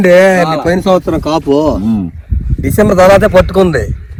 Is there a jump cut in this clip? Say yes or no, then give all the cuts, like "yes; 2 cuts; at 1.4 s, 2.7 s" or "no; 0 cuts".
no; 0 cuts